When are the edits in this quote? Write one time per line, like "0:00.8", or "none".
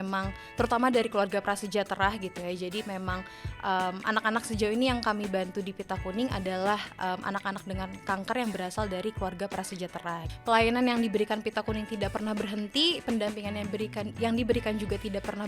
0:10.3